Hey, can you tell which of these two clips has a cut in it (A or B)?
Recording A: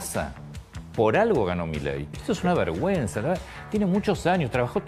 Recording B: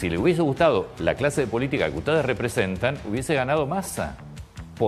A